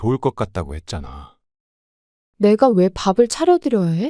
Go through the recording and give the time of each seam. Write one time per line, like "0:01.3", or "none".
0:01.9